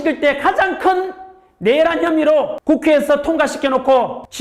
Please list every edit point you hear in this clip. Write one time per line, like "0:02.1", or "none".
none

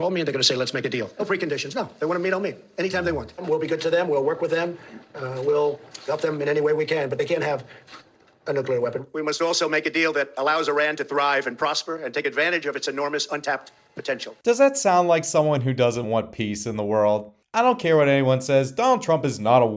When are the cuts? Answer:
none

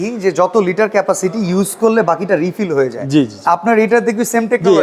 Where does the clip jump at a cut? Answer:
none

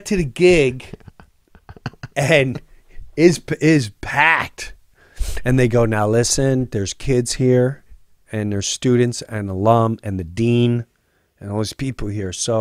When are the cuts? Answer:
none

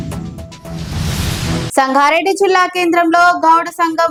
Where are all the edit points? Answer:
none

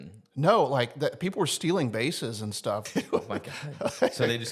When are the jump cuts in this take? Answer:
0:02.8

